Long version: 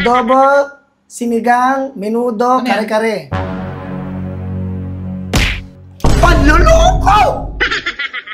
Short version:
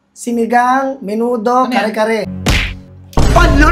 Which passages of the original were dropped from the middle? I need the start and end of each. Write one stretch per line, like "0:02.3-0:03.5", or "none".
0:03.3-0:05.2